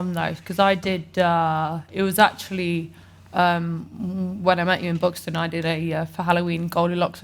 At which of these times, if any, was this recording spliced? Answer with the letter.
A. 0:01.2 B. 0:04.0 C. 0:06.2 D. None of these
D